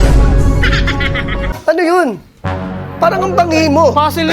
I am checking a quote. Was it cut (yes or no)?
yes